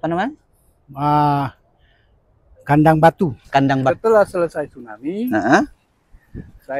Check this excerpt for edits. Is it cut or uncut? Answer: cut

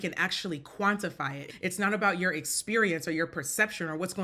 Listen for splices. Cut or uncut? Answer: cut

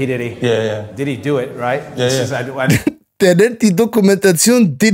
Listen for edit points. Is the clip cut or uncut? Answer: uncut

